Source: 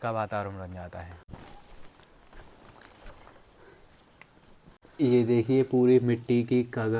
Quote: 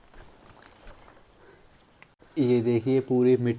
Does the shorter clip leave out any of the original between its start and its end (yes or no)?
yes